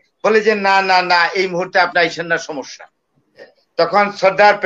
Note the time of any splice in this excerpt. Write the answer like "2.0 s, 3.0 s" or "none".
3.6 s

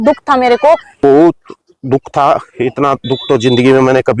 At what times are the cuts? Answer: 1.0 s

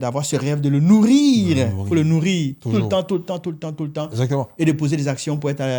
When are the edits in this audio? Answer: none

